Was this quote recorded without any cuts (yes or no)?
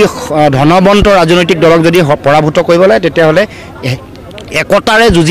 yes